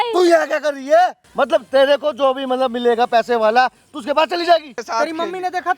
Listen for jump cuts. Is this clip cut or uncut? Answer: cut